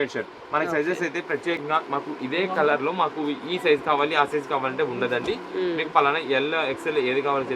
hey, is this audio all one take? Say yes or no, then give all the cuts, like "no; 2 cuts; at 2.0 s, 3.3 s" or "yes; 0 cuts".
yes; 0 cuts